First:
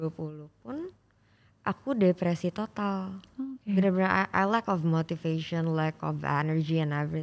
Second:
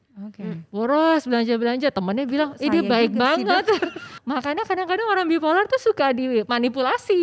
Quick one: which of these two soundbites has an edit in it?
second; 1 cut; at 4.1 s

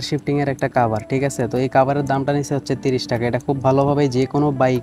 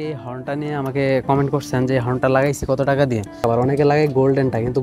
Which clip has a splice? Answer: second; 1 cut; at 3.4 s

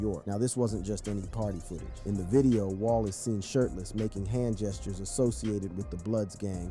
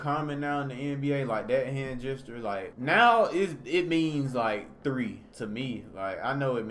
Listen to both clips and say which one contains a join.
second; 2 cuts; at 2.7 s, 5.3 s

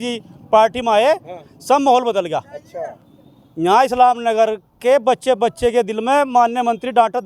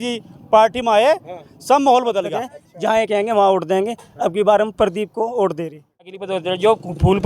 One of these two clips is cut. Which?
second; 2 cuts; at 2.6 s, 6.1 s

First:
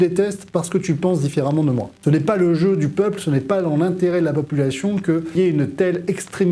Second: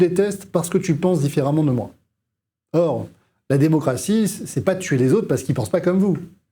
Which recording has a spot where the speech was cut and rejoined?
first; 2 cuts; at 2.0 s, 5.3 s

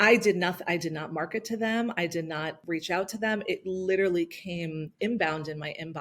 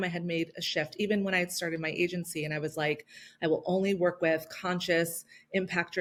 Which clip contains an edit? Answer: first; 1 cut; at 2.6 s

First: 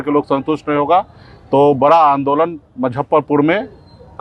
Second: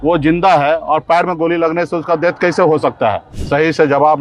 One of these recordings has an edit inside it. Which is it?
second; 1 cut; at 3.3 s

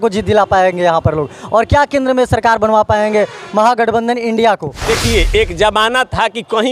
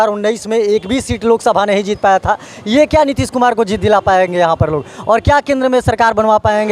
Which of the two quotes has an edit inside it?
first; 1 cut; at 4.7 s

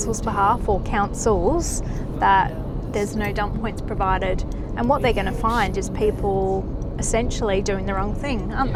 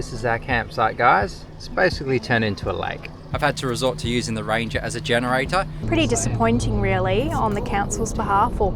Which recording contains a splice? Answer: second; 2 cuts; at 3.3 s, 5.8 s

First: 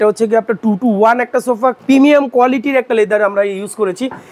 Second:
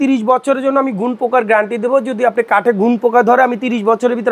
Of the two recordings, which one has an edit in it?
first; 1 cut; at 1.8 s

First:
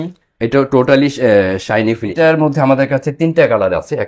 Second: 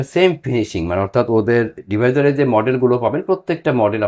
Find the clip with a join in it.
first; 1 cut; at 2.1 s

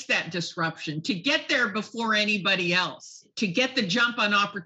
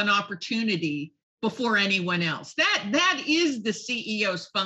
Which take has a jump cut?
first; 1 cut; at 3.3 s

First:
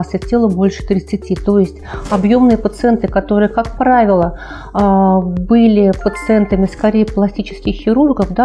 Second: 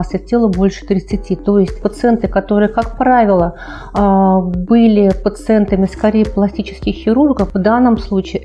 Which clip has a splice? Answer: second; 2 cuts; at 1.9 s, 7.5 s

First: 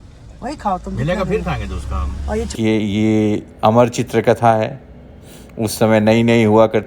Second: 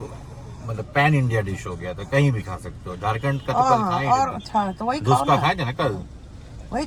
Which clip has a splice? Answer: first; 1 cut; at 2.5 s

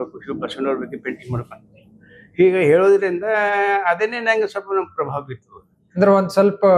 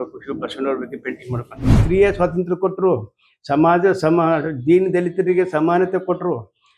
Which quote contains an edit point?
second; 1 cut; at 1.8 s

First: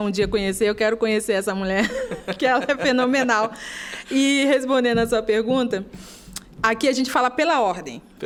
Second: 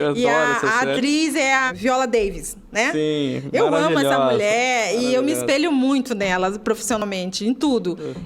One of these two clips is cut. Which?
second; 1 cut; at 1.7 s

